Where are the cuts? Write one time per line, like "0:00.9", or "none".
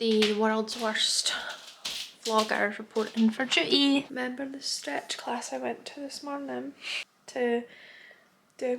0:04.1